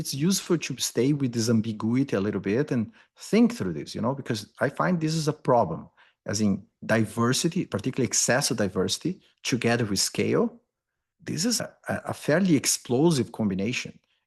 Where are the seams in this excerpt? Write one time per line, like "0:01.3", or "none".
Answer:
0:09.3